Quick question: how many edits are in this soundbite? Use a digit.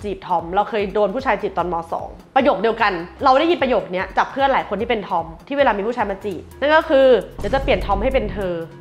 0